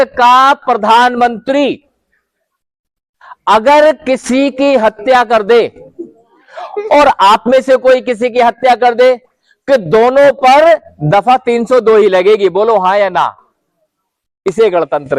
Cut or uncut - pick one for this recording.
uncut